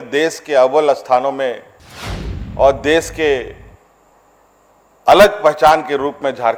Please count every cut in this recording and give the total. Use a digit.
0